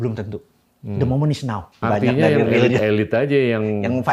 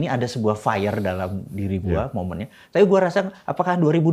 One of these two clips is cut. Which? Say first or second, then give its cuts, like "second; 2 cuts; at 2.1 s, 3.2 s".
first; 1 cut; at 1.8 s